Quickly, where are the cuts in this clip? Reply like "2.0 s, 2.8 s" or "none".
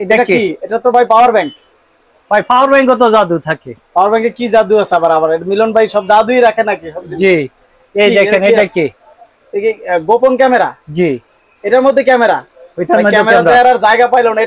none